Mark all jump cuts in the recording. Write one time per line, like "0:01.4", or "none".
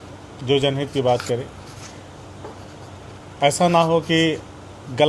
none